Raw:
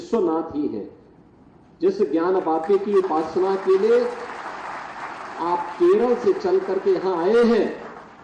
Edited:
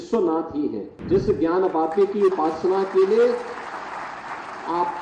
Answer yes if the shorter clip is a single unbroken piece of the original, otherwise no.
no